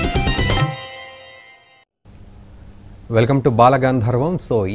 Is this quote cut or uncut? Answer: uncut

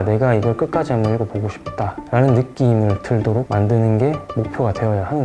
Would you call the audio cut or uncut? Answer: uncut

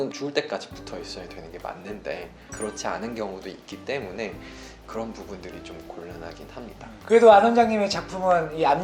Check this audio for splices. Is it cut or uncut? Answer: cut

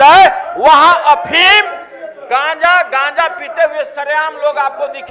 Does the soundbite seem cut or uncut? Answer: uncut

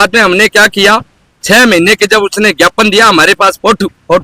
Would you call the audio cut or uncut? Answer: uncut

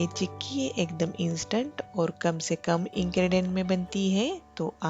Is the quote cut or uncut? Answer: uncut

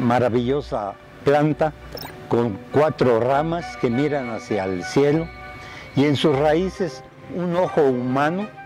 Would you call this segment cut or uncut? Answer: uncut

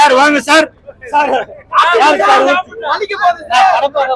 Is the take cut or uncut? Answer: uncut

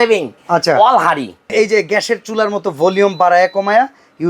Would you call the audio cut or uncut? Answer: cut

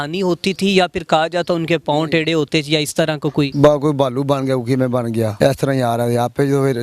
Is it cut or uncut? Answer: cut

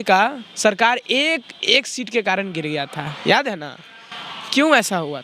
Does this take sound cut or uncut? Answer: uncut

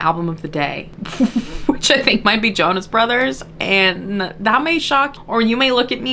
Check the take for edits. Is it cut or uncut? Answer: uncut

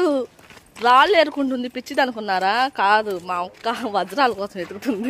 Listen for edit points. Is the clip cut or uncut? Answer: uncut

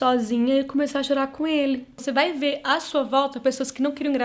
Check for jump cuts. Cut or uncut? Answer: cut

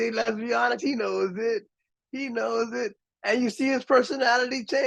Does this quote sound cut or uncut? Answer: uncut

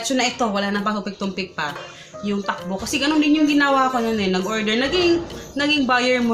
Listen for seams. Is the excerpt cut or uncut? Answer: cut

